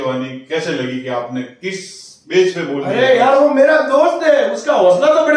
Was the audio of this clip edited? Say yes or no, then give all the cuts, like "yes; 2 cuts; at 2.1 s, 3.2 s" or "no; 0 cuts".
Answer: no; 0 cuts